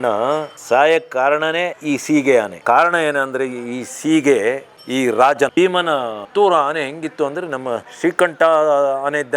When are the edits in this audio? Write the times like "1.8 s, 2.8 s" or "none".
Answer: 5.8 s, 7.9 s